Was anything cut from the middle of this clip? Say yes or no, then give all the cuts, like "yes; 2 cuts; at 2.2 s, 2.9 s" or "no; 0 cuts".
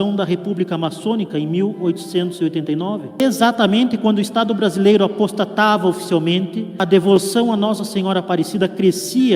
yes; 2 cuts; at 3.2 s, 6.7 s